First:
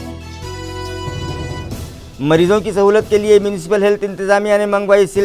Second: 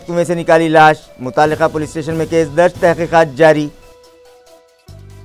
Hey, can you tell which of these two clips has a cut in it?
first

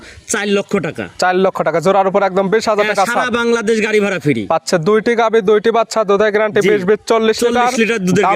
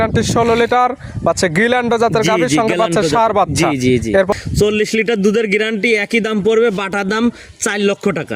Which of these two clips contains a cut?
second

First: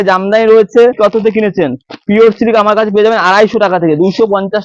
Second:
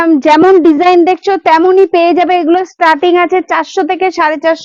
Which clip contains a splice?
first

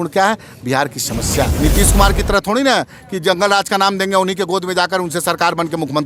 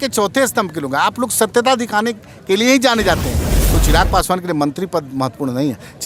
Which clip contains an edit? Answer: first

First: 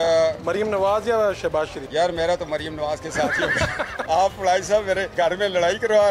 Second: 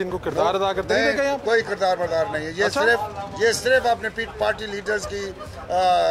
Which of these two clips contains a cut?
first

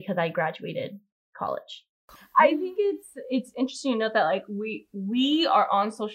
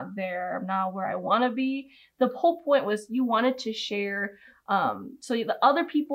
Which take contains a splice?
first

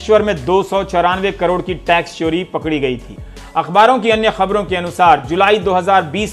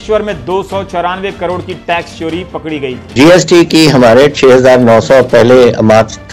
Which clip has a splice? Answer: second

